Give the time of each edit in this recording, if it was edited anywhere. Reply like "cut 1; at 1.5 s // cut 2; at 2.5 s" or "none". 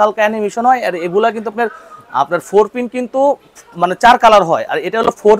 none

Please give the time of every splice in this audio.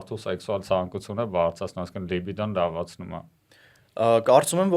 none

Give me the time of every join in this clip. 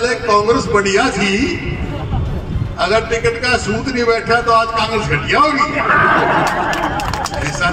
none

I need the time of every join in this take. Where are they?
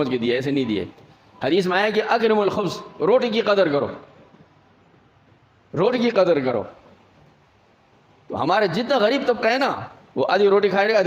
none

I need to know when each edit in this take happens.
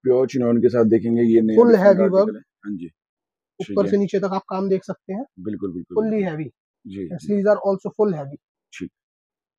none

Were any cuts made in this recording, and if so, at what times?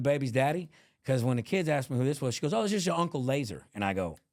none

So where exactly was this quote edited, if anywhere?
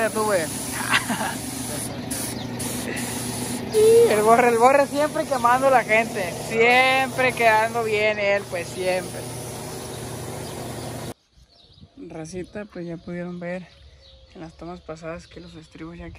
none

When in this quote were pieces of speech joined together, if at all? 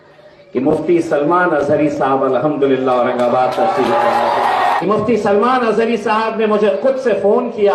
cut 1; at 4.8 s

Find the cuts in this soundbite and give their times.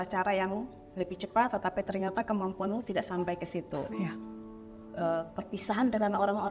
none

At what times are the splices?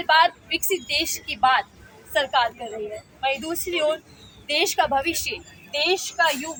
none

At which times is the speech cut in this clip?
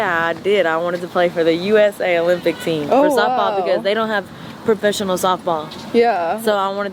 none

